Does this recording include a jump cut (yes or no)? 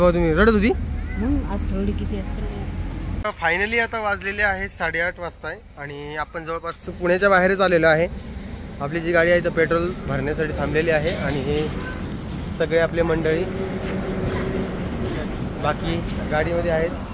yes